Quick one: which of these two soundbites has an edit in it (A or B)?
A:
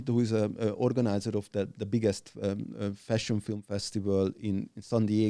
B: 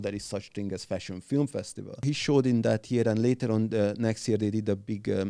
B